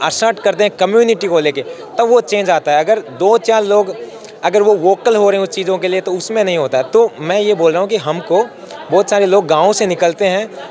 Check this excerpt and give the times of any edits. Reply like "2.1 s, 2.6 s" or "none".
none